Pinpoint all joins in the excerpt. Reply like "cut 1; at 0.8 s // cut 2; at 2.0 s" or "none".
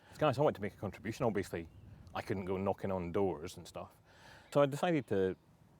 cut 1; at 4.5 s